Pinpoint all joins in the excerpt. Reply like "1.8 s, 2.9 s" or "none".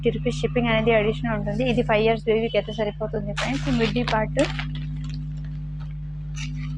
3.6 s